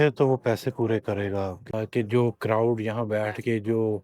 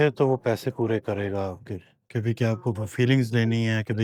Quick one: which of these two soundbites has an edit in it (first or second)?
first